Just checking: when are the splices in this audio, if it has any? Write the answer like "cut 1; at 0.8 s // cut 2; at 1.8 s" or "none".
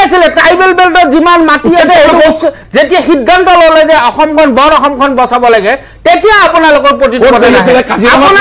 cut 1; at 2.6 s